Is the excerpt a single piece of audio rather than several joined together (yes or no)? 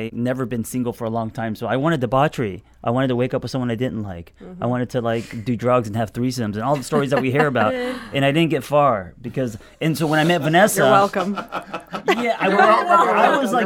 yes